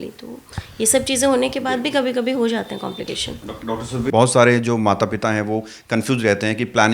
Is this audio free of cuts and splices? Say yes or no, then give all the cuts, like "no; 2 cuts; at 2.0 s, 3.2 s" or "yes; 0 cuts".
no; 1 cut; at 4.1 s